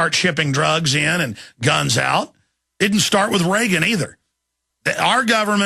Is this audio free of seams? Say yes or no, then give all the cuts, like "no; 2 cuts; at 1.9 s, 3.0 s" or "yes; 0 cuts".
no; 1 cut; at 1.9 s